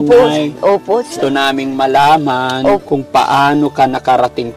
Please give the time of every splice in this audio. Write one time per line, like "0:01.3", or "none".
0:01.1
0:02.8